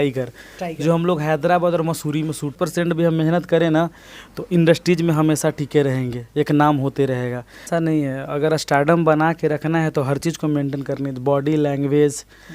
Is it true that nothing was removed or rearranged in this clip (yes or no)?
no